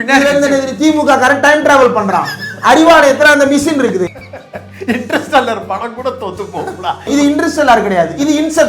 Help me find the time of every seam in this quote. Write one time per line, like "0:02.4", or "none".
0:04.1
0:07.1